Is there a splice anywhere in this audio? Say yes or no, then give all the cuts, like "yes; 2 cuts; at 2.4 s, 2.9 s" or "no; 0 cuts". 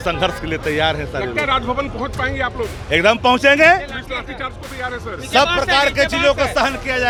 no; 0 cuts